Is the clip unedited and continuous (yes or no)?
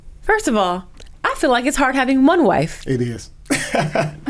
yes